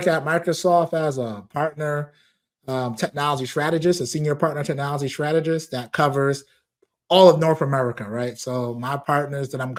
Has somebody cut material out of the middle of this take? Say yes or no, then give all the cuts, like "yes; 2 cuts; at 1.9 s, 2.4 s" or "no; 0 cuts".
no; 0 cuts